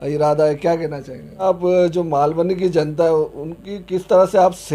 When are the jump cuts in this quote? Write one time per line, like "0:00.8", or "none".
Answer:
0:01.4